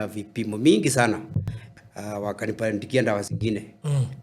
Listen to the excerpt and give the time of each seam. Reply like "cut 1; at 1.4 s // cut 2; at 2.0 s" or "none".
cut 1; at 1.3 s